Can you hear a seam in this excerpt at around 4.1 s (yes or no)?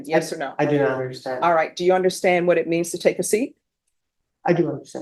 no